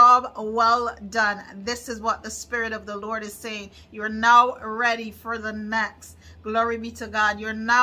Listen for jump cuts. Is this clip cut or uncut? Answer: uncut